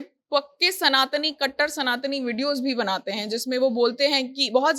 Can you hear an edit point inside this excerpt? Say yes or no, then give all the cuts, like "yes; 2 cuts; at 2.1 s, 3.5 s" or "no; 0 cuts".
no; 0 cuts